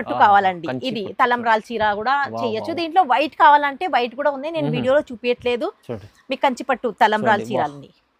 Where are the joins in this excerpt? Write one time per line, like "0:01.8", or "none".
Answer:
none